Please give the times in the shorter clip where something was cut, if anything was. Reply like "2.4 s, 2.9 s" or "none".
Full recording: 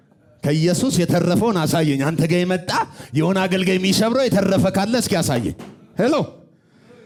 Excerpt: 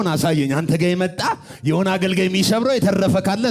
none